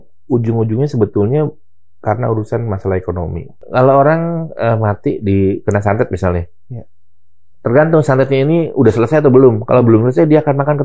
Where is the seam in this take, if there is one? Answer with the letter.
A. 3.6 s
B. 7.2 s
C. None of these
A